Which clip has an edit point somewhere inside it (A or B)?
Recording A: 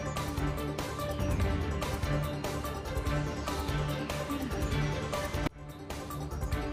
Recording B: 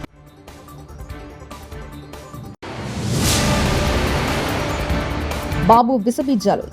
B